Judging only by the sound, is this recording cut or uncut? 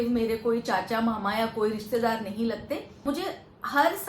cut